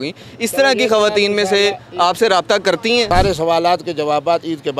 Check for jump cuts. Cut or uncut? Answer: cut